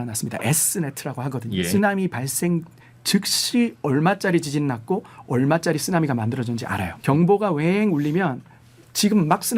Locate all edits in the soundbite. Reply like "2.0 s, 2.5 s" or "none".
1.7 s, 6.9 s